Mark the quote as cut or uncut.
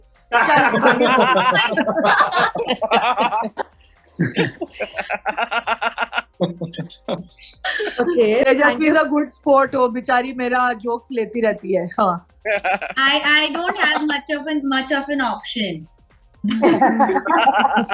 uncut